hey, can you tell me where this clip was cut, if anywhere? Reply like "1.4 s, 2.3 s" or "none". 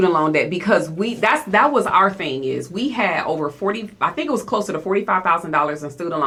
none